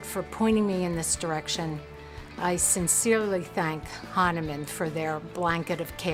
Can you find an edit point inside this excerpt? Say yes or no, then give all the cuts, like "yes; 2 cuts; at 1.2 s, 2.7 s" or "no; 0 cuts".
no; 0 cuts